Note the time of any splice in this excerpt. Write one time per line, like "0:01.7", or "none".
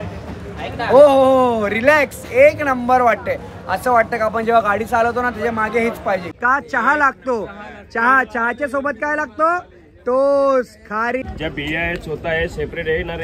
0:06.3
0:11.2